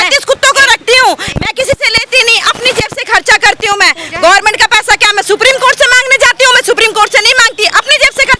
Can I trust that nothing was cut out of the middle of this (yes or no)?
yes